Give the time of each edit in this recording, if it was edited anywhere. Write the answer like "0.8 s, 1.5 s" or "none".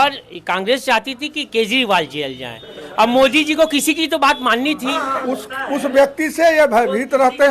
5.2 s